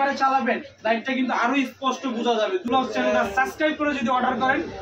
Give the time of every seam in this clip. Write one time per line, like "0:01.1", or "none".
0:02.6